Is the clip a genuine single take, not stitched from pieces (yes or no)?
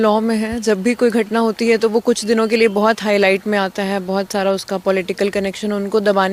yes